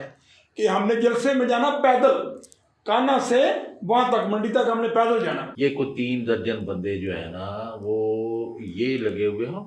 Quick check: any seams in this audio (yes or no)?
yes